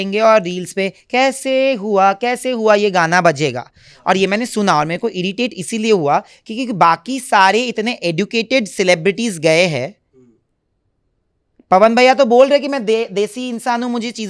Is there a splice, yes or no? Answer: no